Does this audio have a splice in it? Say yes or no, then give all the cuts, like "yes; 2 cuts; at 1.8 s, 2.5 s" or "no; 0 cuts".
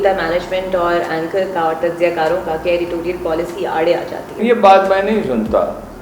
yes; 1 cut; at 4.4 s